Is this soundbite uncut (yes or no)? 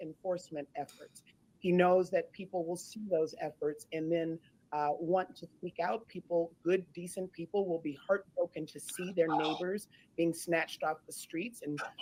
yes